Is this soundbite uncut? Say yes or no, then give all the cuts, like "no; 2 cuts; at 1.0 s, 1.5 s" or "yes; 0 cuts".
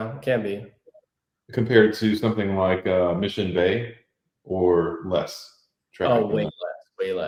yes; 0 cuts